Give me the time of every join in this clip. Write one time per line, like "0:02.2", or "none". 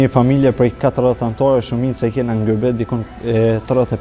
none